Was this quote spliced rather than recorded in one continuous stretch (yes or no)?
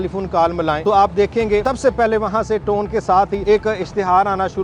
yes